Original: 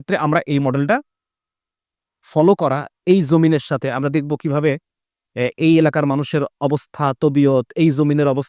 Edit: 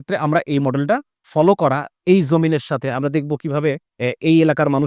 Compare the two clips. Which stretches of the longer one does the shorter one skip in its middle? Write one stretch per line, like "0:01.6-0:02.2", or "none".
0:01.2-0:02.2
0:04.9-0:05.2